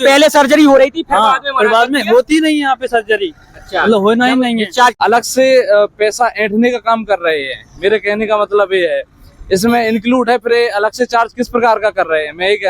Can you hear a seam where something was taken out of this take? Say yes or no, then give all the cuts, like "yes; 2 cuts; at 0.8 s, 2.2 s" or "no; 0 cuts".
yes; 1 cut; at 4.9 s